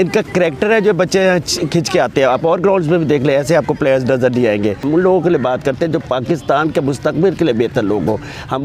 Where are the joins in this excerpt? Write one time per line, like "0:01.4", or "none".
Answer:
0:04.8